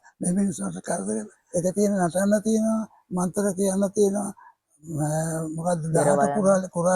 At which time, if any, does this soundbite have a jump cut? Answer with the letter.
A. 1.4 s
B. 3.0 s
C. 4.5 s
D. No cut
A